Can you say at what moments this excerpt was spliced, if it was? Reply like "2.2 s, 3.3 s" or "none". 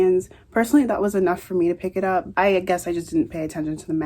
2.3 s